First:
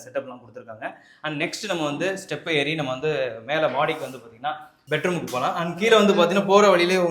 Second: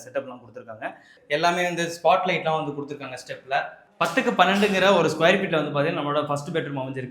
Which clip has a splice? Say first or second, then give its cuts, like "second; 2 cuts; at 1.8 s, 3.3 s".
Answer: second; 2 cuts; at 1.1 s, 3.9 s